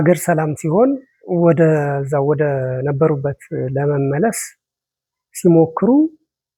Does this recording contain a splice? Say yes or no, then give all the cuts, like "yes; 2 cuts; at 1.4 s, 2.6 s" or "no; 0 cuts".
no; 0 cuts